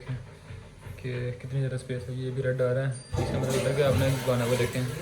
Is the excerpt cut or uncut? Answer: uncut